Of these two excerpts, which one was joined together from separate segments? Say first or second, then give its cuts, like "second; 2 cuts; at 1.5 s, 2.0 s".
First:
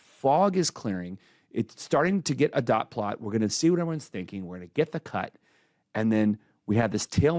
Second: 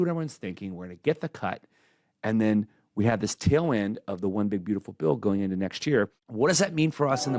second; 1 cut; at 6.2 s